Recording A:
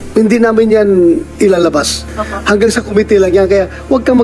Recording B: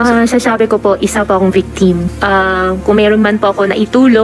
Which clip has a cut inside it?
B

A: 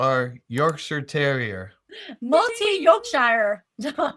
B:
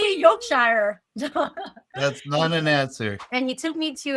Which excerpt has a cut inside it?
B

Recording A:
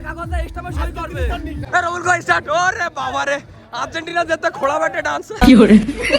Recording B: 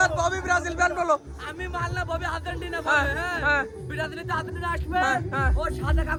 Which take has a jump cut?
A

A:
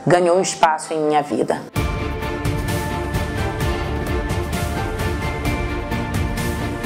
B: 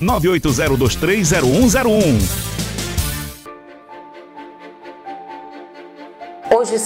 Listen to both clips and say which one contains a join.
B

